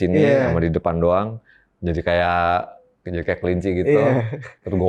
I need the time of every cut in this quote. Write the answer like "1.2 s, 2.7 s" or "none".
none